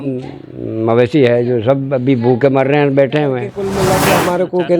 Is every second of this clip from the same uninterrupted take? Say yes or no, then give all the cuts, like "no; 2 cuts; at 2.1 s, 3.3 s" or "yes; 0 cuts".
no; 1 cut; at 3.6 s